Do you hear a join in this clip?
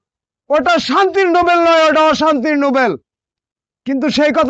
no; 0 cuts

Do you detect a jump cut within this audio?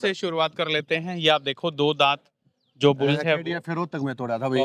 no; 0 cuts

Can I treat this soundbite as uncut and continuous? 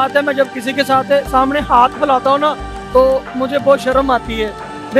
yes; 0 cuts

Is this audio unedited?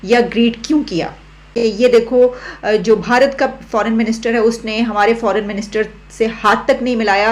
no; 1 cut; at 1.6 s

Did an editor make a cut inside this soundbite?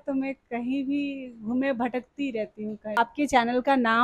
yes; 1 cut; at 3.0 s

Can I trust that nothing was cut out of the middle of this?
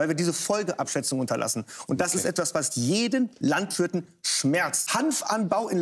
no; 1 cut; at 4.8 s

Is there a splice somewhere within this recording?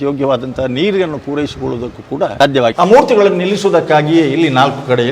yes; 1 cut; at 2.6 s

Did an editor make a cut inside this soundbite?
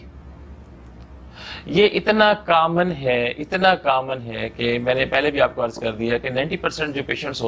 no; 0 cuts

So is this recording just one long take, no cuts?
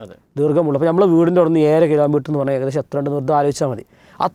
yes; 0 cuts

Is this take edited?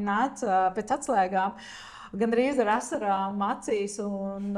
no; 0 cuts

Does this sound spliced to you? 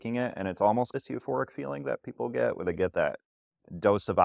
no; 0 cuts

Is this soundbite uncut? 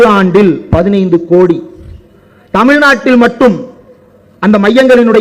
yes; 0 cuts

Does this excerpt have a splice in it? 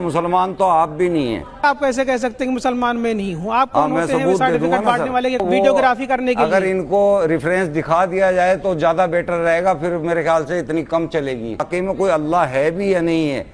yes; 3 cuts; at 1.6 s, 5.4 s, 11.6 s

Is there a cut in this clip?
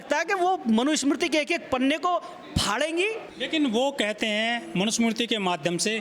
no; 0 cuts

